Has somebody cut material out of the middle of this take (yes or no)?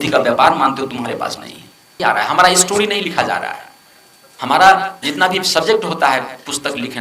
yes